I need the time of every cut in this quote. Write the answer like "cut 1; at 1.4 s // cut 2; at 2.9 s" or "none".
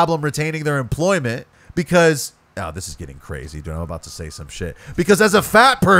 cut 1; at 1.6 s